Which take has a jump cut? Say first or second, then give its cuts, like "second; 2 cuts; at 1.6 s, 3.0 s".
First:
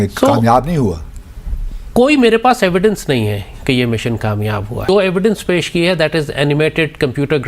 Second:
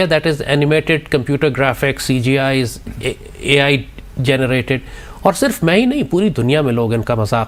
first; 1 cut; at 4.8 s